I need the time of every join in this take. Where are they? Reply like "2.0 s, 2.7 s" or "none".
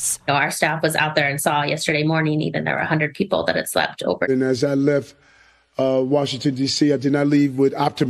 4.3 s